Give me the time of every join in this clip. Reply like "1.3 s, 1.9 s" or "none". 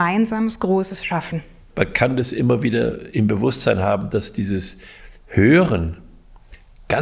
1.6 s